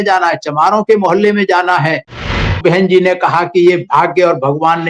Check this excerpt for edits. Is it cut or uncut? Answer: cut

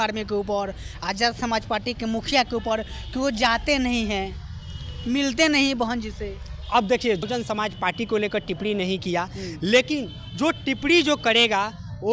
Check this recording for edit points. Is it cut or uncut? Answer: cut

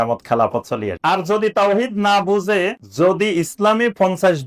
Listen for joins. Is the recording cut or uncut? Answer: cut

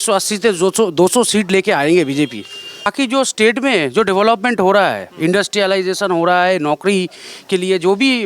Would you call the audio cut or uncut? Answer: cut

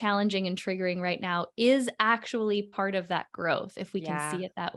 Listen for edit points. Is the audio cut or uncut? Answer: uncut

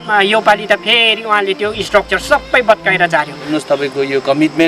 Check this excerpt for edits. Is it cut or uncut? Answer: cut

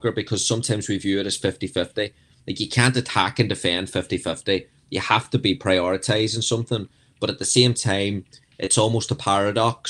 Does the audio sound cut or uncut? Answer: uncut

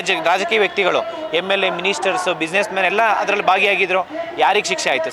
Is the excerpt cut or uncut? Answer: uncut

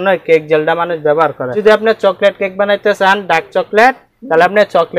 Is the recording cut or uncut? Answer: cut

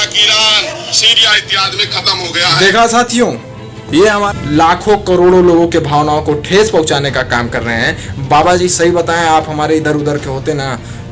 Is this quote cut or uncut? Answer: cut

